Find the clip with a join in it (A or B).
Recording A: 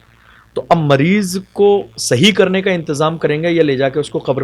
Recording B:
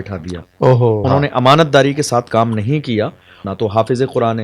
B